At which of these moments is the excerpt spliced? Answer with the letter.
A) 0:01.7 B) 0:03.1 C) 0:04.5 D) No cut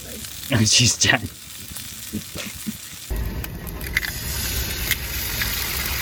D